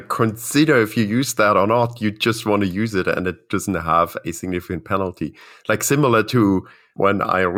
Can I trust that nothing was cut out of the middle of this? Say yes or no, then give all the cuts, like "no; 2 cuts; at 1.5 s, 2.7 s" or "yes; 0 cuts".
yes; 0 cuts